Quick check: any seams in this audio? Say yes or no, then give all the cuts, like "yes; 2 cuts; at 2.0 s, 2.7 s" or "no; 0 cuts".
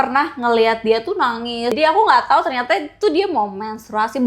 yes; 1 cut; at 1.8 s